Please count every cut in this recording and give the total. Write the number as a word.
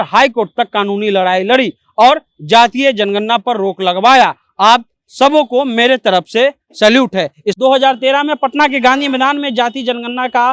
one